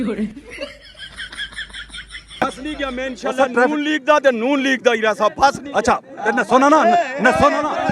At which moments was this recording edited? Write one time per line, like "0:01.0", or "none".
0:02.3